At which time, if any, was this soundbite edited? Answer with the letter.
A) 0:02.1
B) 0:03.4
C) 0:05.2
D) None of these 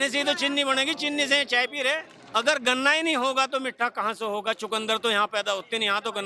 A